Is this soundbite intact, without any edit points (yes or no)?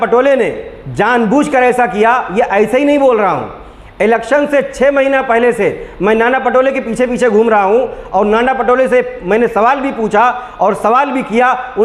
yes